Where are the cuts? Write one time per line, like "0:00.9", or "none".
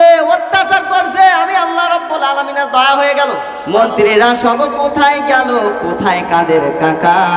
0:03.6